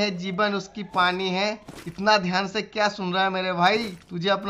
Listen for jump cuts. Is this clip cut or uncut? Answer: uncut